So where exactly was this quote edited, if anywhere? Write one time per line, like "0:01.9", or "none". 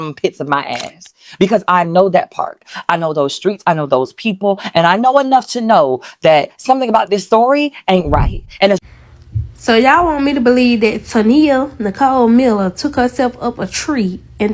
0:08.8